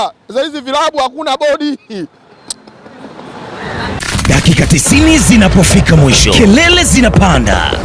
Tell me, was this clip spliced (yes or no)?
yes